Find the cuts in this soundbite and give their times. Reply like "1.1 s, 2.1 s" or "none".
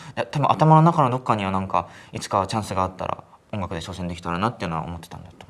none